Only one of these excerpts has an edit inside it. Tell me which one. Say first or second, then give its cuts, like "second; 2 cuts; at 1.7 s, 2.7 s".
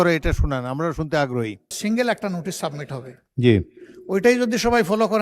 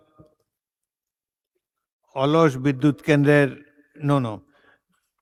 first; 1 cut; at 1.7 s